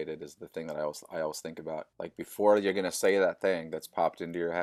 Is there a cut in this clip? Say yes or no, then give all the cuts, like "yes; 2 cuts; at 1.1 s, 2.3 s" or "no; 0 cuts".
no; 0 cuts